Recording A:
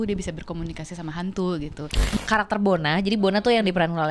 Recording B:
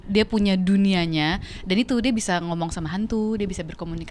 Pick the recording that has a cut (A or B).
A